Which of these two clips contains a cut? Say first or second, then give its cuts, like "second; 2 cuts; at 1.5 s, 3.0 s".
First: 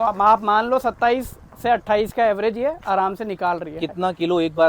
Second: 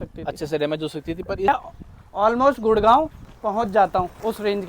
second; 1 cut; at 1.5 s